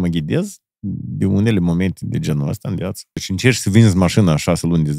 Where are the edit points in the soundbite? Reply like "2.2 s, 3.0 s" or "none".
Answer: 3.2 s